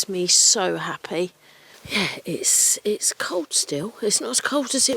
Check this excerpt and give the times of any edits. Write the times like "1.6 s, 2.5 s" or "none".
none